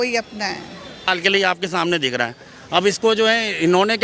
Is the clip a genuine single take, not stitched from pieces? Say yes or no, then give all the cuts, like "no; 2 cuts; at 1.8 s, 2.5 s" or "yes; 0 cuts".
no; 1 cut; at 1.1 s